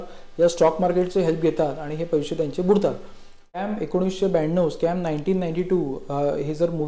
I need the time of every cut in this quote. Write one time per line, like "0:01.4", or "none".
0:03.6